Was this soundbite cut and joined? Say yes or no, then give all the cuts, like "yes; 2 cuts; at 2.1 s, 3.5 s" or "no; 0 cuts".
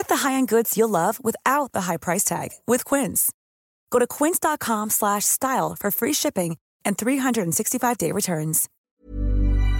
yes; 1 cut; at 8.8 s